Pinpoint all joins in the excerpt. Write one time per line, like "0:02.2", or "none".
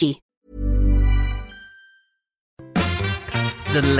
0:02.5